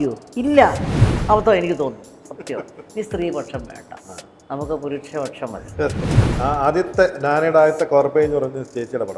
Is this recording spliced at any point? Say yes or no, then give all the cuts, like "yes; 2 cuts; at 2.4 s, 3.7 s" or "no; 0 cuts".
yes; 2 cuts; at 1.2 s, 6.1 s